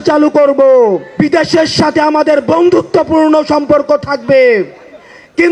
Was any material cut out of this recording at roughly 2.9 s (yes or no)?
no